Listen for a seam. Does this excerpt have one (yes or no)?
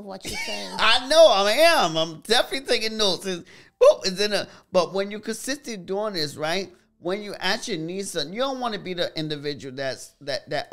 no